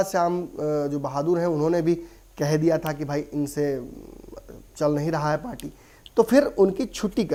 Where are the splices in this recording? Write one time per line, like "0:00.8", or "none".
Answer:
none